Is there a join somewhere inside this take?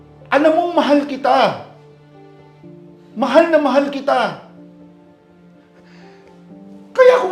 yes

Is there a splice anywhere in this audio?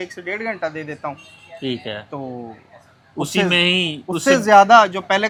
no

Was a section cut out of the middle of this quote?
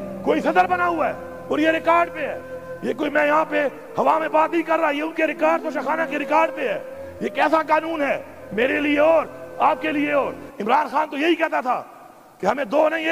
no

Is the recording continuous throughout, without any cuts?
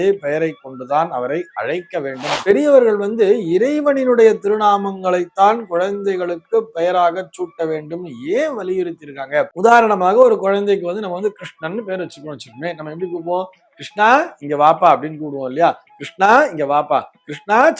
no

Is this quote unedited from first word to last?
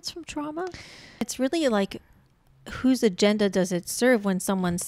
no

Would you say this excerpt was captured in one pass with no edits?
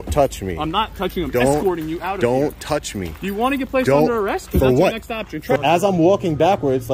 no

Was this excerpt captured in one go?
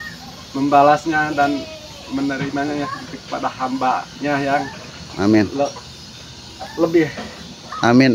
yes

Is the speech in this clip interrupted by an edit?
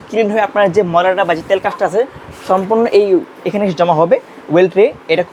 no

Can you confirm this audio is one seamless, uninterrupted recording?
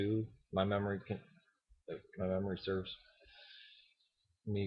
yes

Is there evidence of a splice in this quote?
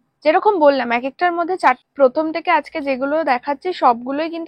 yes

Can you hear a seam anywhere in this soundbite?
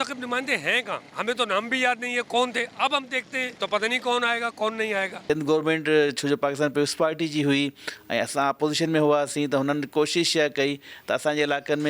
yes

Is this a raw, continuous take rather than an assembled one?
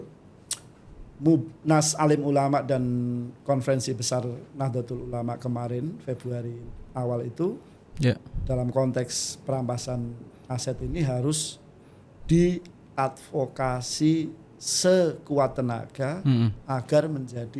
yes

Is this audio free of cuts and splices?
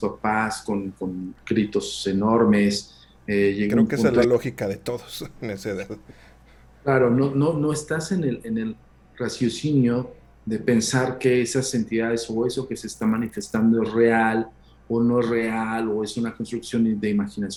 yes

